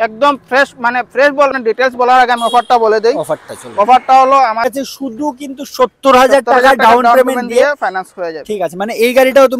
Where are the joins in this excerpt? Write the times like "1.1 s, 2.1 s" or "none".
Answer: 1.6 s, 4.7 s

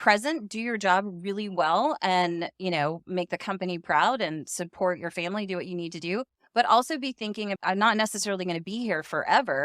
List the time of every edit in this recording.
7.5 s

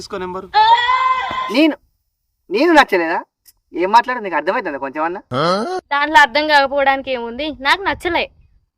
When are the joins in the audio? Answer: 1.5 s

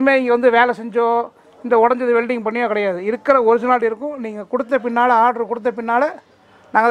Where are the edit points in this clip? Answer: none

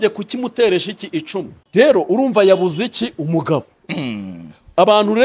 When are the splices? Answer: 1.6 s

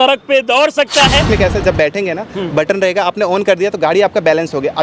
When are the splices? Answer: 1.2 s

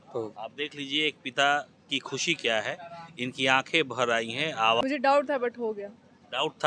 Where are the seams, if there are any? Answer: 4.8 s

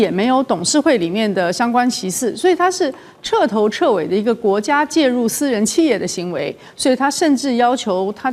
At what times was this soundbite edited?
none

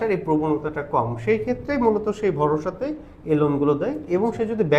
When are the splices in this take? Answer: none

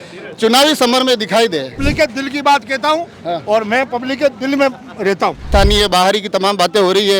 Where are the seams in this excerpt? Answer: 1.8 s, 5.5 s

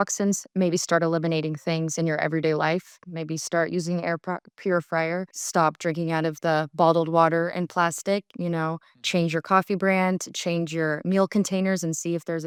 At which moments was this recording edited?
none

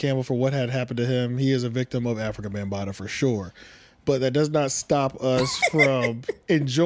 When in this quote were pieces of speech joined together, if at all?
none

